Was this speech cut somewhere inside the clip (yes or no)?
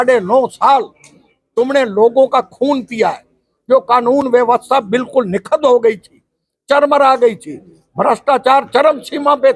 no